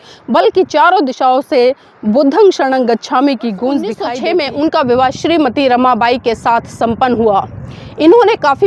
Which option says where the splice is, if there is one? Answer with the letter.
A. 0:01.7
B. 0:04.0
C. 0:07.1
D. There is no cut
B